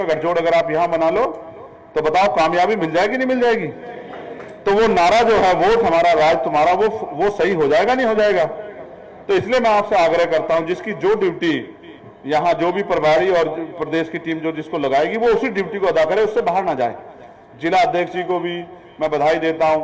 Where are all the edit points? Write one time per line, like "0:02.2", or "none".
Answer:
none